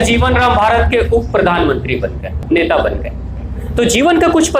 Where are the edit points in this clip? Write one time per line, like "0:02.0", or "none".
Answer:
0:02.4